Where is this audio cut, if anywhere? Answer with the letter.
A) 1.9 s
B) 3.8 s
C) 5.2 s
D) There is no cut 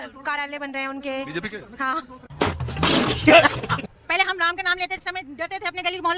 B